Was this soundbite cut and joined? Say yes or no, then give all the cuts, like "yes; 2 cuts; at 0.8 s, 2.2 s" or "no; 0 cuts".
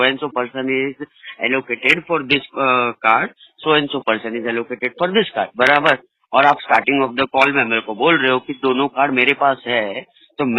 no; 0 cuts